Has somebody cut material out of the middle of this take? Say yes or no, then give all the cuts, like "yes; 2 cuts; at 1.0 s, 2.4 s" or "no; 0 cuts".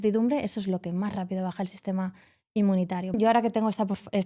yes; 1 cut; at 3.2 s